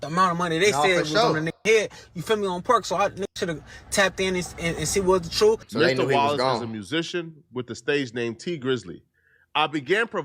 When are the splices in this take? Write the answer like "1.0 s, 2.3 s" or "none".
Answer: 5.7 s